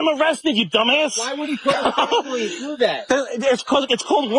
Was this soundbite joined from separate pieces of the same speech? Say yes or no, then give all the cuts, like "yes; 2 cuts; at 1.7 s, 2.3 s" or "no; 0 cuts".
no; 0 cuts